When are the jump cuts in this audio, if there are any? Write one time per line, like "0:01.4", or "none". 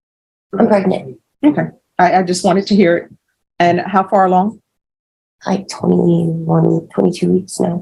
none